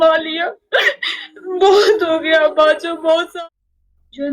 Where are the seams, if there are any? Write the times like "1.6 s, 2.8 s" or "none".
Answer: 3.3 s